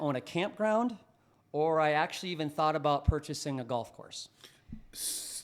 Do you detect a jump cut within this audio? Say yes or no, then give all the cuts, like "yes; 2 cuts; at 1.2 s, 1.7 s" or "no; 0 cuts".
no; 0 cuts